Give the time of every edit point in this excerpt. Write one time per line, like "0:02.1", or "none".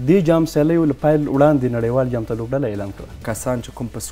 0:03.2